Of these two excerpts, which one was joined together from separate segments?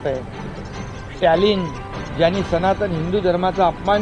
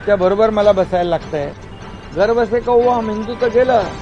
second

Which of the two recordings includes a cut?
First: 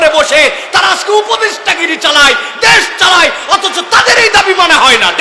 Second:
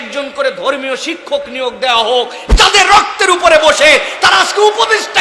second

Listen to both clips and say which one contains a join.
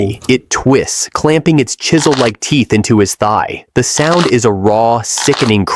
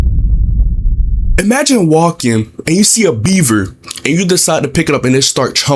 second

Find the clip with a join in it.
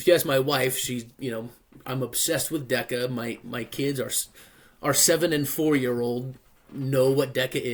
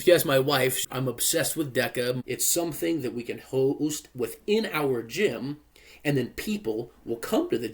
second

